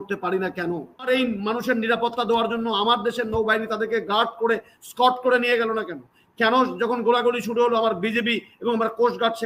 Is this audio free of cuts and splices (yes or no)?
no